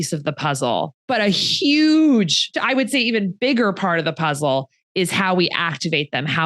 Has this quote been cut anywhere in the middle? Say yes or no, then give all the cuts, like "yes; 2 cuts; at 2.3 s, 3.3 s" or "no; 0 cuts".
yes; 2 cuts; at 1.0 s, 2.6 s